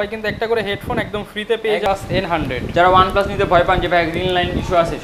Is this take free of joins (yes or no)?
no